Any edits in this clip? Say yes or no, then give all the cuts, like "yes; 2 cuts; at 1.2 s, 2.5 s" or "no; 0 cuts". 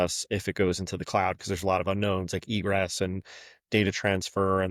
no; 0 cuts